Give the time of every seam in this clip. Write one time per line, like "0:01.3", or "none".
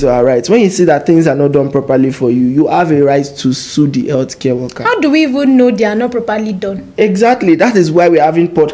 none